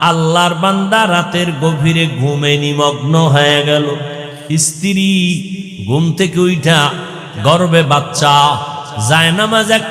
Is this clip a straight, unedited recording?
no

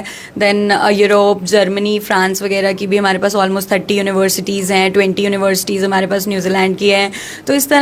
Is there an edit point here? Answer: no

